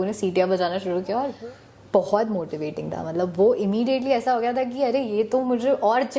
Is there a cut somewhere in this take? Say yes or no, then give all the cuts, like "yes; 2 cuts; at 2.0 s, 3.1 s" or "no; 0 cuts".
yes; 1 cut; at 1.3 s